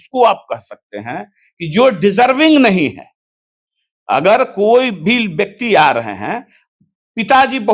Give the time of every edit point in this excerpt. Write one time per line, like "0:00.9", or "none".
none

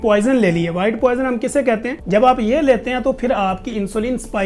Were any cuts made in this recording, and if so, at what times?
0:02.0

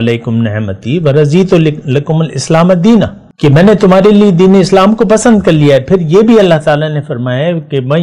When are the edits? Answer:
0:03.2

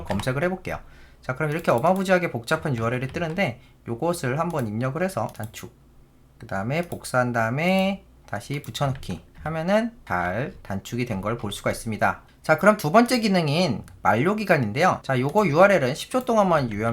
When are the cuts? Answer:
0:05.3
0:10.0
0:15.0

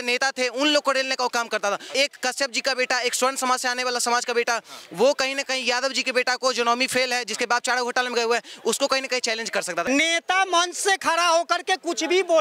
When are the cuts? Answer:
0:01.9
0:09.9

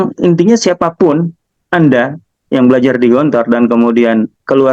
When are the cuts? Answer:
none

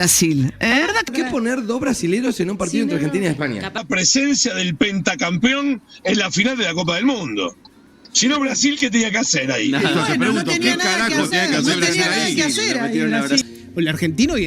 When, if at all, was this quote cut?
0:01.1
0:03.8
0:13.4

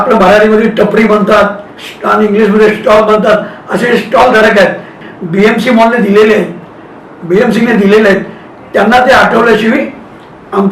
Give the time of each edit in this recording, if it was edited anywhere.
0:05.0

